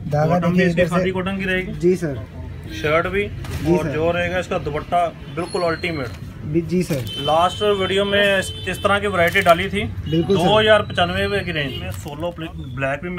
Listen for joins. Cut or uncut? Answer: cut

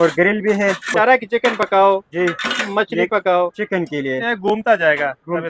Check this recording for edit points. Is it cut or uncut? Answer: cut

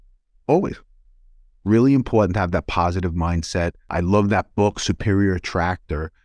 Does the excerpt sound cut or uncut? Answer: cut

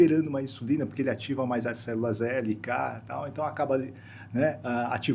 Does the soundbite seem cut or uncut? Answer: uncut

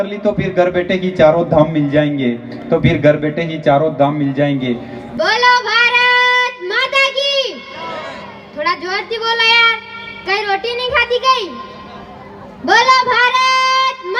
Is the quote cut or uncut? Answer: uncut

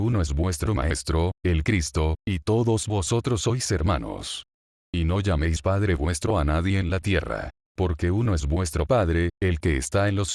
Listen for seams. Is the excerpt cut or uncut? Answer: uncut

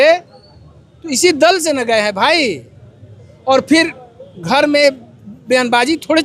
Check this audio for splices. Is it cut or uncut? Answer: uncut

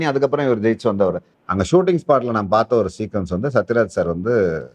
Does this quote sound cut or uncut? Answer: cut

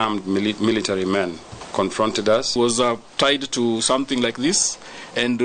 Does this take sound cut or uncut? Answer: cut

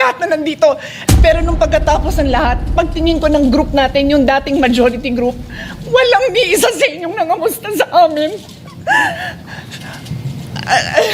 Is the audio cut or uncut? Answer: cut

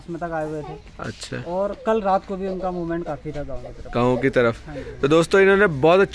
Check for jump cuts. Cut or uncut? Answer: uncut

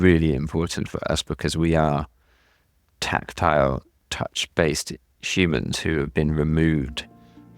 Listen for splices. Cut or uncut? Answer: uncut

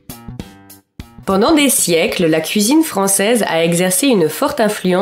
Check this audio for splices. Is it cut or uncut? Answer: cut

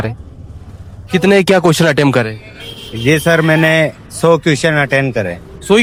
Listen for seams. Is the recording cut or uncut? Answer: uncut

